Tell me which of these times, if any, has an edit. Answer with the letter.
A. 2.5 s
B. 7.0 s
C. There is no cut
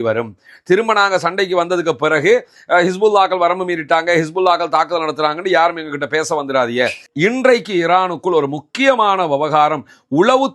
B